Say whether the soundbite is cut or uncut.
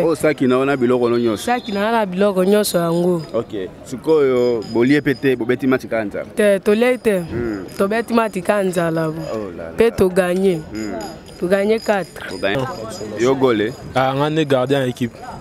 uncut